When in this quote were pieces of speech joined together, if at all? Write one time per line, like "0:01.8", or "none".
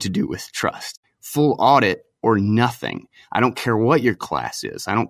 0:01.0

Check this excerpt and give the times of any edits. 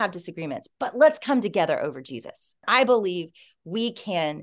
0:02.5

